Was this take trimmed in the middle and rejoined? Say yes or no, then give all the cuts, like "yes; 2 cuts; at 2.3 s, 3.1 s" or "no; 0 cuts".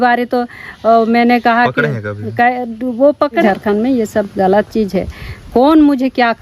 yes; 1 cut; at 3.4 s